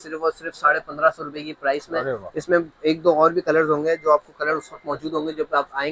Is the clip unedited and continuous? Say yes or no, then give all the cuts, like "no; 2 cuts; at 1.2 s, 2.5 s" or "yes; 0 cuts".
yes; 0 cuts